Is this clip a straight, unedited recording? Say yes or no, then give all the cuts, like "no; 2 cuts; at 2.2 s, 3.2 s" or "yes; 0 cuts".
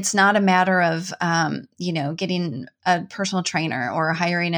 yes; 0 cuts